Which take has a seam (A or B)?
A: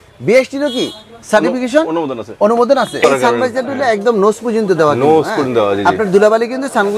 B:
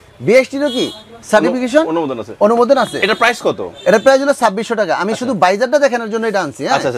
A